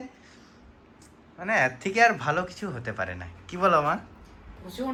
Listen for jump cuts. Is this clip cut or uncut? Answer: uncut